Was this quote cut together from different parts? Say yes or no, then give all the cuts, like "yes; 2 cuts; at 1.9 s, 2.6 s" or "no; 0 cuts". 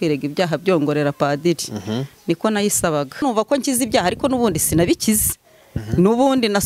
yes; 1 cut; at 3.2 s